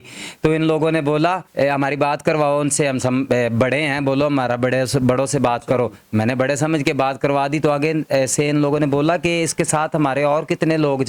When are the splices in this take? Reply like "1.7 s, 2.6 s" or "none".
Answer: 1.4 s